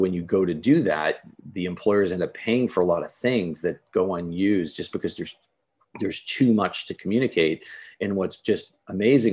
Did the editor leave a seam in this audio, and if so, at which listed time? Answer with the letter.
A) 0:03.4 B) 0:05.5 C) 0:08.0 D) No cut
D